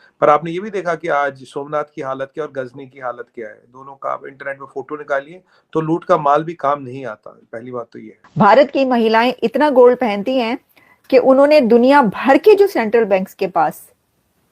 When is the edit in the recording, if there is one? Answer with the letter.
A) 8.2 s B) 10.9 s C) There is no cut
A